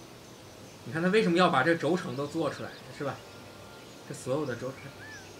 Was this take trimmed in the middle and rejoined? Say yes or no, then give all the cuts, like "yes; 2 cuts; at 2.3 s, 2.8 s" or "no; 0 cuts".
no; 0 cuts